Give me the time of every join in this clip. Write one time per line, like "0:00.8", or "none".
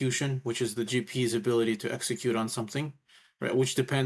none